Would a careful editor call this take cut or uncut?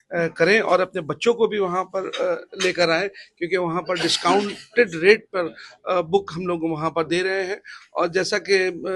uncut